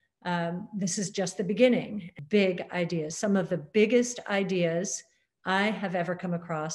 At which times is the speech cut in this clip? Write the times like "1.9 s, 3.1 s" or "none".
2.1 s